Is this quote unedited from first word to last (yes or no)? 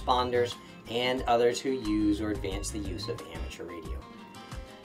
yes